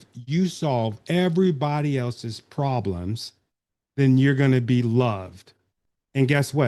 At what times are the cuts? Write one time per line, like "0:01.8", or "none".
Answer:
none